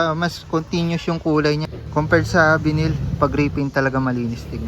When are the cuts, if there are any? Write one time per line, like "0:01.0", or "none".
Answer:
0:01.8